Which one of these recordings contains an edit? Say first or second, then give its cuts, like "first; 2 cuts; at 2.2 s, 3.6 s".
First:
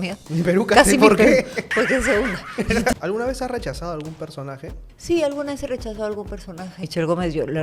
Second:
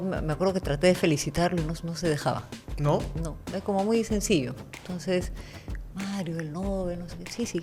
first; 3 cuts; at 2.9 s, 4.9 s, 6.8 s